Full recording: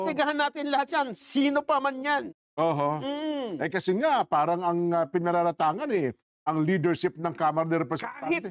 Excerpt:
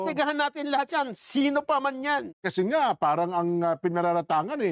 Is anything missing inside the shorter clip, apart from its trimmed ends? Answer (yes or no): yes